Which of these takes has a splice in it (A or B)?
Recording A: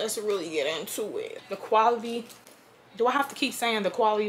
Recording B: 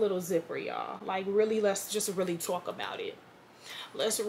A